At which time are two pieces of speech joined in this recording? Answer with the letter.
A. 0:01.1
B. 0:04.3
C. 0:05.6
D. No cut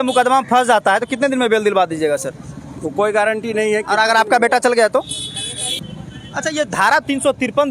C